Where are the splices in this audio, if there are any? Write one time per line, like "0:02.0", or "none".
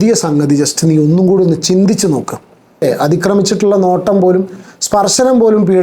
0:02.8